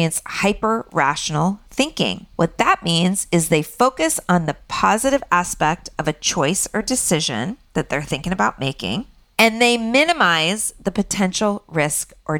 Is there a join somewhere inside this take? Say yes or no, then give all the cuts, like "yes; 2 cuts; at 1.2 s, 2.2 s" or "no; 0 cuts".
no; 0 cuts